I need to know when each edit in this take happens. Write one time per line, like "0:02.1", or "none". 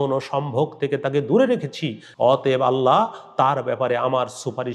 0:02.0